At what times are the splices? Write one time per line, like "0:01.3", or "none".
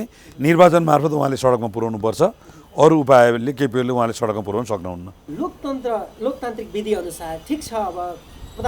none